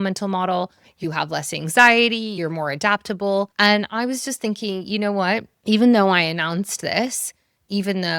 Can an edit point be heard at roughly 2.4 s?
yes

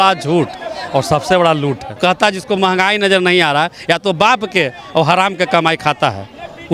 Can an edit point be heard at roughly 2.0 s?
yes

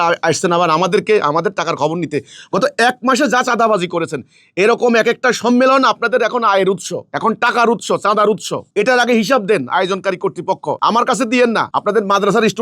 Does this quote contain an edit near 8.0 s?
no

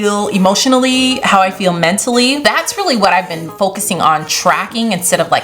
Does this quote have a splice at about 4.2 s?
no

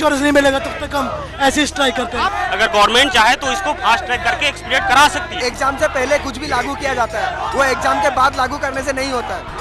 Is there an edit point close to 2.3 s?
yes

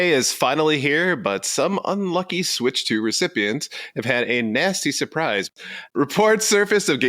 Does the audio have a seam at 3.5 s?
no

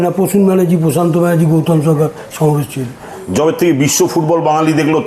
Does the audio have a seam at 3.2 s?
yes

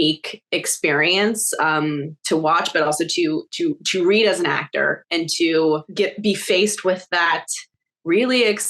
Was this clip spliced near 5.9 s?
yes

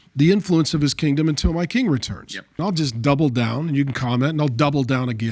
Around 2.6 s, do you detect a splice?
yes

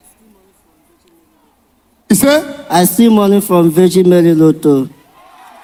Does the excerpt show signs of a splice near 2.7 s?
no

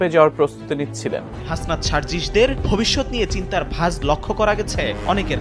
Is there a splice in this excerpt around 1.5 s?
yes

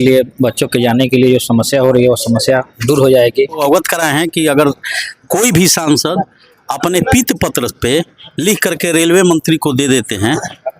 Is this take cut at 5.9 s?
no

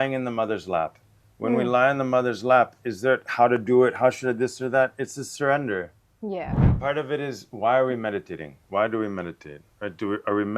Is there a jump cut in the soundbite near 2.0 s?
no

